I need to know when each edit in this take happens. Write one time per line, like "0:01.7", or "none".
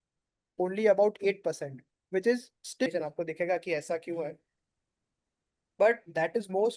0:02.9